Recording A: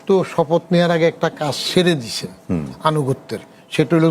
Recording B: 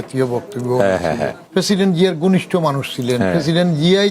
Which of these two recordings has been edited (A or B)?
B